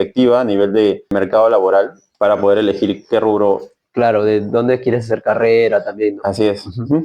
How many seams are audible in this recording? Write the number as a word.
two